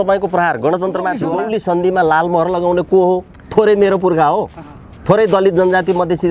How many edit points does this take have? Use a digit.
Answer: 1